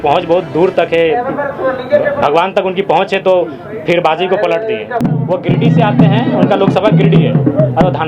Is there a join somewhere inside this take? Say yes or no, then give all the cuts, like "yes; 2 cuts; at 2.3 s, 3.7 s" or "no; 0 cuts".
yes; 1 cut; at 5.0 s